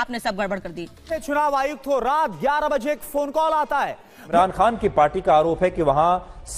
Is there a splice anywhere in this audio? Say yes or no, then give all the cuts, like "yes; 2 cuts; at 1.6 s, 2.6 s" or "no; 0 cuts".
yes; 2 cuts; at 1.1 s, 4.4 s